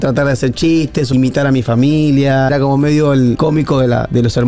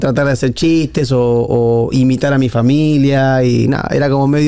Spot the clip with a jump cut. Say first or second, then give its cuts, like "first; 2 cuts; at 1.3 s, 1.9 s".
first; 3 cuts; at 1.1 s, 2.5 s, 3.4 s